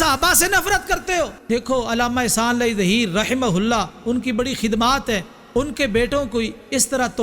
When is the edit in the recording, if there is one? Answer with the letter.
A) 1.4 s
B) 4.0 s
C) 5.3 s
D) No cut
A